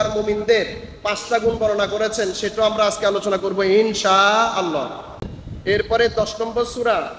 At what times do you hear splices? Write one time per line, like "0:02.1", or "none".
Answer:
0:05.2

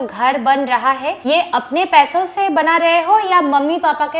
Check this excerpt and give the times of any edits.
0:01.1

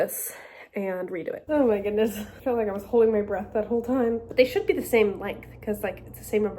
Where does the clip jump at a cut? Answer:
0:01.4
0:04.2

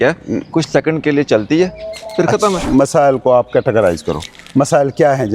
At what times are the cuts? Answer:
0:02.6

